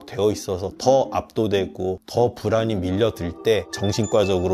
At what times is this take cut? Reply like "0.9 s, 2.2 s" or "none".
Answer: none